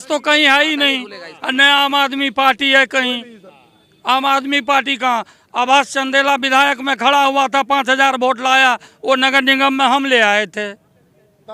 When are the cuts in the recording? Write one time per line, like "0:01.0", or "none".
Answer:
none

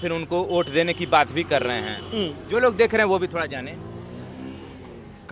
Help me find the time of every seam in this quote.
none

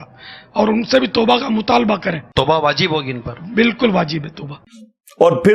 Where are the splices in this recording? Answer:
none

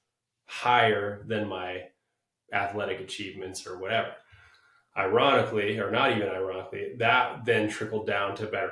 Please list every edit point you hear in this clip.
none

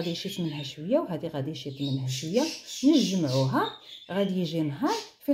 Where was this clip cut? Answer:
none

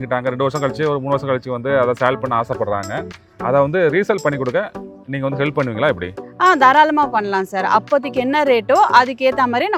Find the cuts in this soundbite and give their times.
none

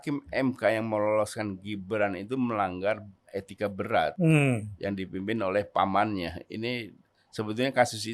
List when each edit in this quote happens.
0:04.1

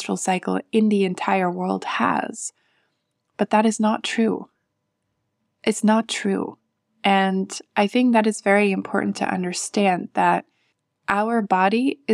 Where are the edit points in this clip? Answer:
none

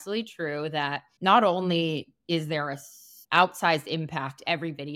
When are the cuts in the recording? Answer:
none

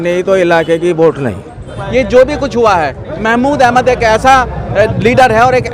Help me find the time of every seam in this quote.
0:01.7

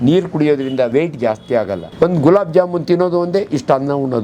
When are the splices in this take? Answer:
0:00.9
0:01.9

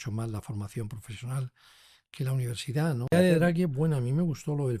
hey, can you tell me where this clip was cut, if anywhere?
0:03.1

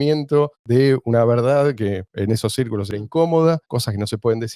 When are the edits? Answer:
none

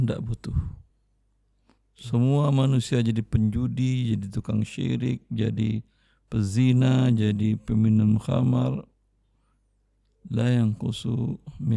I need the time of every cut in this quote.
none

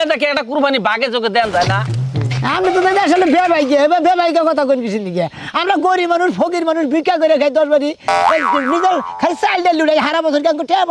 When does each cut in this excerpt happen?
none

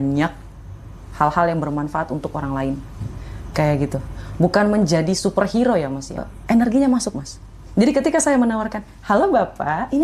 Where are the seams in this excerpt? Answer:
0:06.3

